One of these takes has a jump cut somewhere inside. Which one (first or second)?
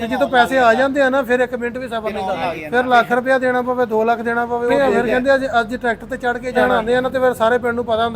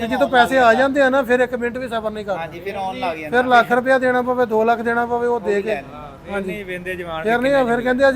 first